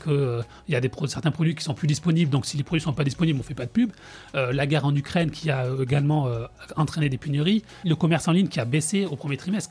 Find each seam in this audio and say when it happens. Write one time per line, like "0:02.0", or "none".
0:07.9